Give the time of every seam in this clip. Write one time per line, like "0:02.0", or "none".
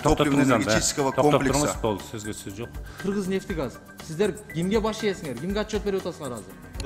0:03.0